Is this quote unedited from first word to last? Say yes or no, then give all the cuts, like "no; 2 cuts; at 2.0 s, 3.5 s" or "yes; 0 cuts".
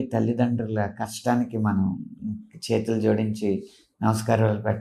yes; 0 cuts